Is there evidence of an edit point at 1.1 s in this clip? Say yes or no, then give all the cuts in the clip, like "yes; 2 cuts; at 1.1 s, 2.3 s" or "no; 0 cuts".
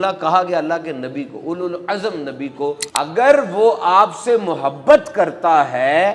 no; 1 cut; at 2.8 s